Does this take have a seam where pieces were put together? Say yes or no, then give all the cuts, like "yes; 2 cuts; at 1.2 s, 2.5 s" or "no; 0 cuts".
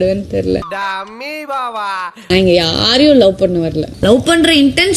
no; 0 cuts